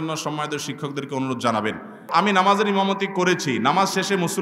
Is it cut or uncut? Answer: cut